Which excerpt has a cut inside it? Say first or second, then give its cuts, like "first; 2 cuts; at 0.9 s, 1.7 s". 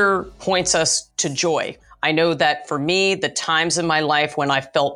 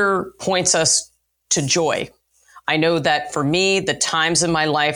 first; 1 cut; at 1.4 s